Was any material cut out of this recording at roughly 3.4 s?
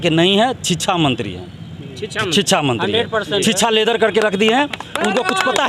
no; 0 cuts

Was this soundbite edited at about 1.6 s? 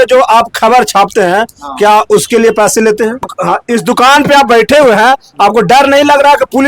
no; 1 cut; at 3.3 s

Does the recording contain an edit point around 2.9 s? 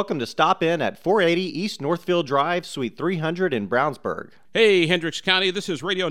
no; 1 cut; at 4.4 s

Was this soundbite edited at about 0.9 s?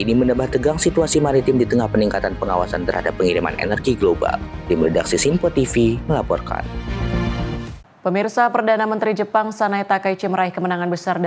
no; 1 cut; at 7.7 s

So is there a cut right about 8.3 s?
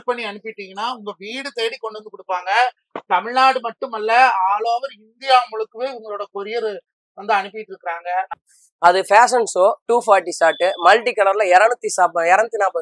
yes; 1 cut; at 8.3 s

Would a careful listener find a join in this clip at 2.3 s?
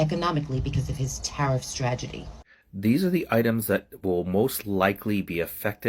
yes; 1 cut; at 2.3 s

